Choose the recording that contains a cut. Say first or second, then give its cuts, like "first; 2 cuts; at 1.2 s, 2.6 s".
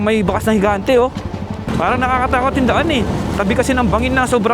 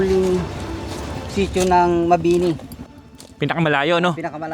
first; 1 cut; at 1.6 s